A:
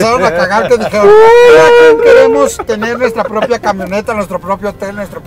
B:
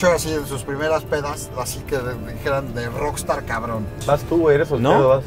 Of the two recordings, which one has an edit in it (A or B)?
B